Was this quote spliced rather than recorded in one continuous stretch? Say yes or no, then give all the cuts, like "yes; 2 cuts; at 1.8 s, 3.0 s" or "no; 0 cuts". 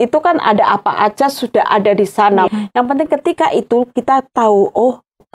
yes; 1 cut; at 2.5 s